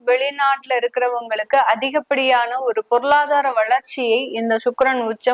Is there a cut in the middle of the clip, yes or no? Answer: no